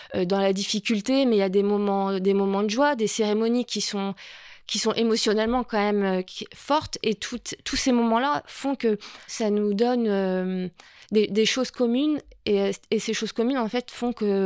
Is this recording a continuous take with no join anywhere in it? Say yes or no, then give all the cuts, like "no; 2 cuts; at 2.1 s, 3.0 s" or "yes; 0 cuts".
yes; 0 cuts